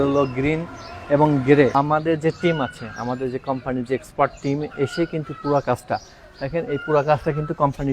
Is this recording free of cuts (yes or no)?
no